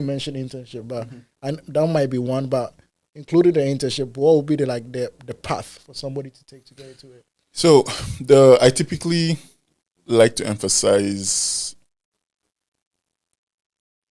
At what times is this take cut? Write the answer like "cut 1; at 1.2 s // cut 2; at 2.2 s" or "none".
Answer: none